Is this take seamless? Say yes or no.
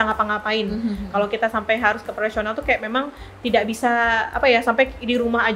yes